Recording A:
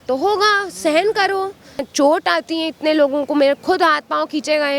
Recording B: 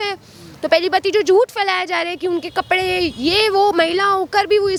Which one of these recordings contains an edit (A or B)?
A